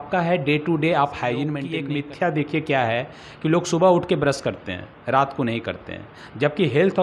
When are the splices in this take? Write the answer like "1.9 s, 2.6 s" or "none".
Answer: none